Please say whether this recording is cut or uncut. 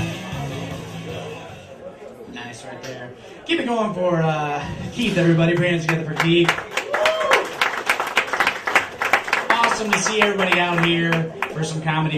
uncut